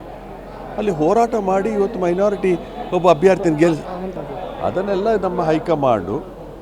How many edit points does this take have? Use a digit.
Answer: 1